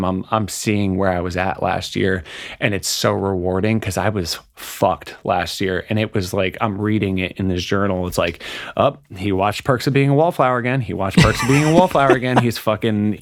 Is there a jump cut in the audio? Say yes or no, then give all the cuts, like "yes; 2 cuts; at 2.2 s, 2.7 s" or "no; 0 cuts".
no; 0 cuts